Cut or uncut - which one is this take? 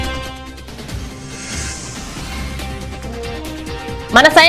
cut